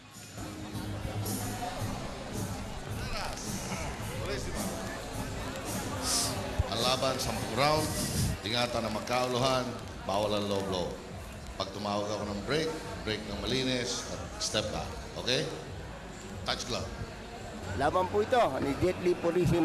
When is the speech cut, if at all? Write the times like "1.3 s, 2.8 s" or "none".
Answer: none